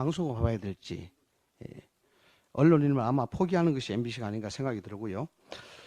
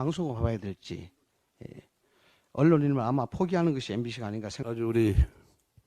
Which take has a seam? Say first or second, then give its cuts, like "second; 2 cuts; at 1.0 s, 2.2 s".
second; 1 cut; at 4.5 s